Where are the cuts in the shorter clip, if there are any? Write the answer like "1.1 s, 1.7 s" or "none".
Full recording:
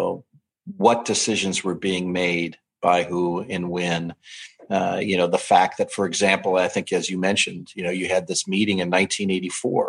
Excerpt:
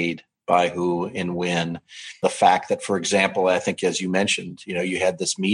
2.2 s